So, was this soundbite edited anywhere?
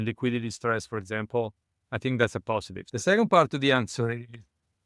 yes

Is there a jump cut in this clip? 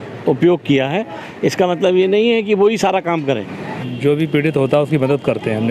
yes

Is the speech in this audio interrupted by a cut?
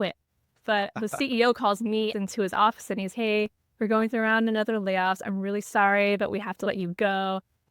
yes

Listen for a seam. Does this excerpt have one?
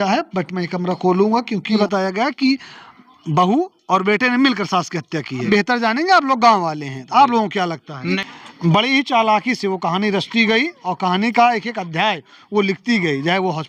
yes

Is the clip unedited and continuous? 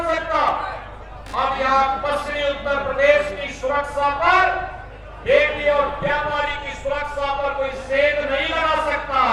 yes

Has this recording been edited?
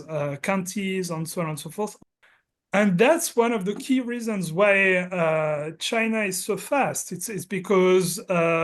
yes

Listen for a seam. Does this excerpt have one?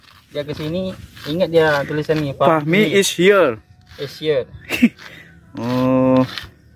no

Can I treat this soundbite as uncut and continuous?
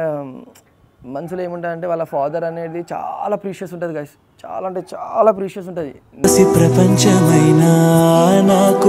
yes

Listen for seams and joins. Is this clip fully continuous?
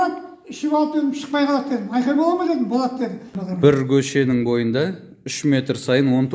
no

